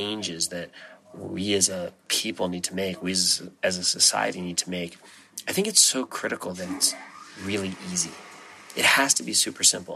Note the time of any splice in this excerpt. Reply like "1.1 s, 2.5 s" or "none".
2.1 s